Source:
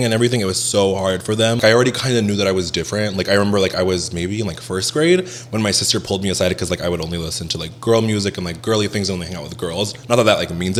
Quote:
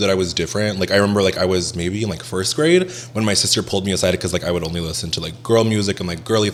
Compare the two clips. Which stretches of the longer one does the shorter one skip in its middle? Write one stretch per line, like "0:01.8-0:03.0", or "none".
none